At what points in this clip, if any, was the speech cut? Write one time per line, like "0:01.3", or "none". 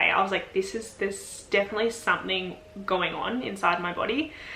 none